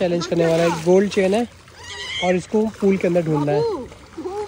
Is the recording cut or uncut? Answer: uncut